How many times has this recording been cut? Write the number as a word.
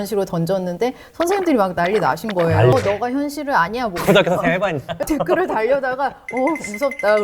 two